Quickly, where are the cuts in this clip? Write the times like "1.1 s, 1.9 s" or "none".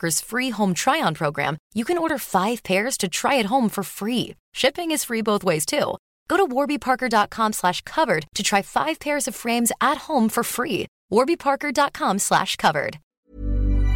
13.1 s